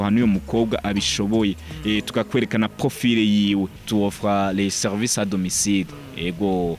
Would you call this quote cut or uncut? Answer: cut